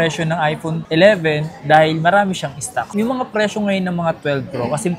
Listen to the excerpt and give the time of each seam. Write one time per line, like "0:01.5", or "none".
0:02.8